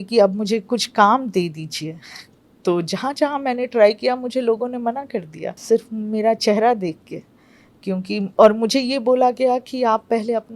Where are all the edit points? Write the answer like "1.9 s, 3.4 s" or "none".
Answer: 5.6 s